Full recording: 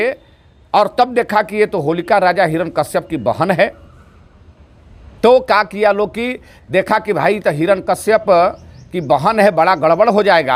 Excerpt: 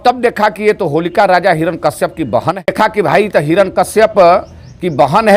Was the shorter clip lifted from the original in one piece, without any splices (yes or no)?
no